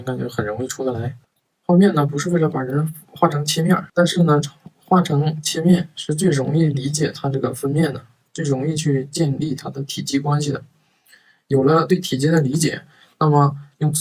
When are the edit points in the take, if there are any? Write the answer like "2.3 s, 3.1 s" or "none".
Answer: 1.0 s, 3.5 s